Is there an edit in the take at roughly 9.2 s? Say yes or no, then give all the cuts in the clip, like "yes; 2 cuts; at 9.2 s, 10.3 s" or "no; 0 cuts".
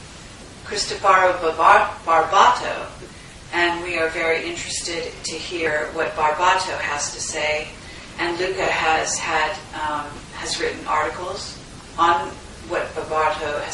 yes; 1 cut; at 9.2 s